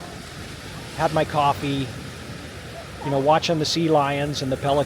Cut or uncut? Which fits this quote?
uncut